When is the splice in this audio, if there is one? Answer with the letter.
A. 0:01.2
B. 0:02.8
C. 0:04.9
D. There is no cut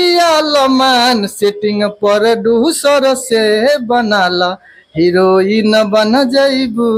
D